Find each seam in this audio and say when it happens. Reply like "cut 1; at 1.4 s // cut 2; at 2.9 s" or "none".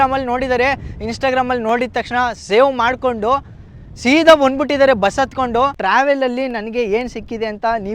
cut 1; at 5.8 s